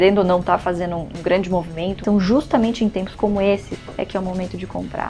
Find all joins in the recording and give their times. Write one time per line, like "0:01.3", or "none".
0:01.1
0:02.0
0:03.7